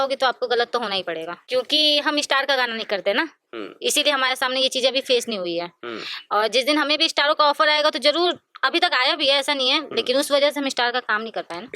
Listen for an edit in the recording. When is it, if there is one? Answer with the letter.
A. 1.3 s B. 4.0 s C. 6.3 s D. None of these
A